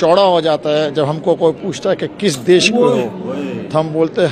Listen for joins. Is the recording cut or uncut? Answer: uncut